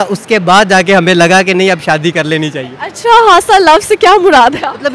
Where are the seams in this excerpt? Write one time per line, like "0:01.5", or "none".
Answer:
none